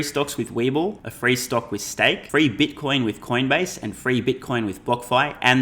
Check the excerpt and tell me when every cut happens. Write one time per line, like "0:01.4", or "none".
0:01.1
0:02.2